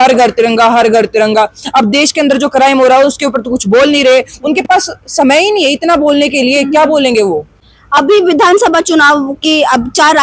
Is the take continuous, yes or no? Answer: yes